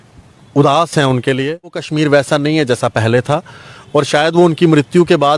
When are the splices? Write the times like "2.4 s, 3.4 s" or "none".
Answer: 1.8 s